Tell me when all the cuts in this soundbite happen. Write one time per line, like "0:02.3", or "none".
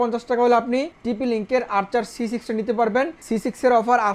0:00.9
0:03.2

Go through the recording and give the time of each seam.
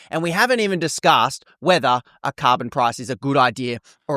none

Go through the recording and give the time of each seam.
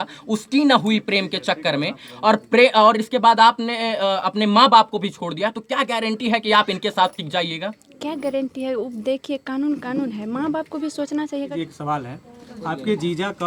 0:11.5

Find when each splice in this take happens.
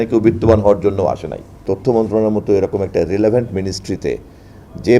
0:01.6

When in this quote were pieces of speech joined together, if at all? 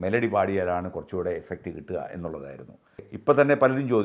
0:03.0

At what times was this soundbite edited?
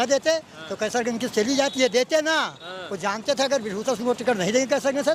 none

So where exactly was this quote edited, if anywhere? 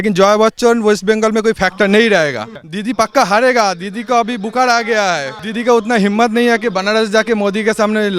0:02.6
0:05.4

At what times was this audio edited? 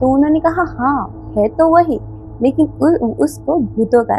none

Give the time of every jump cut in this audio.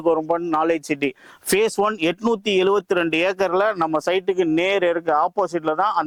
none

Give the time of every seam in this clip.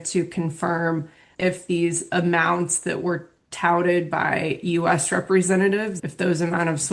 0:01.2
0:06.0

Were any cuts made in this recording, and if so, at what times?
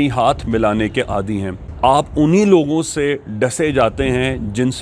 0:01.6

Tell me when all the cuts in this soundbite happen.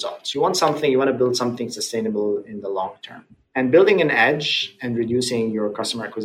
0:02.5

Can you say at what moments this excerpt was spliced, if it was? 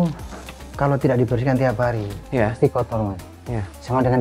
none

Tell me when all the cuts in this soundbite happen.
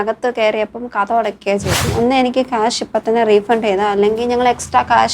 0:01.9

